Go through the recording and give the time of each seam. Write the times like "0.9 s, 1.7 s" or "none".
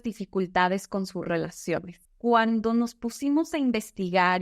2.0 s